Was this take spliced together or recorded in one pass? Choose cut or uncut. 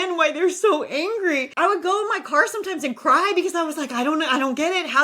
cut